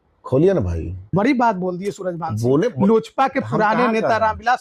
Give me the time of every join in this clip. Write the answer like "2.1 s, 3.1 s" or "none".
1.1 s